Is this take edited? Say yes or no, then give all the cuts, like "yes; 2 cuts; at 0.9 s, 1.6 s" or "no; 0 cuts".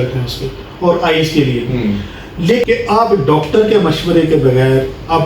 yes; 1 cut; at 2.6 s